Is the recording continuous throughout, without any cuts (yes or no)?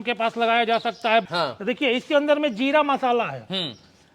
no